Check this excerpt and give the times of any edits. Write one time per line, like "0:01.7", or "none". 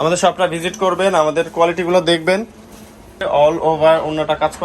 0:03.2